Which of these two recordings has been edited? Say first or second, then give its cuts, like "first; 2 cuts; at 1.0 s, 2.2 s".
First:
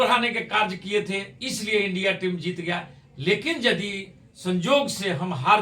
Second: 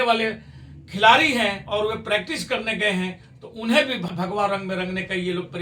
second; 1 cut; at 4.1 s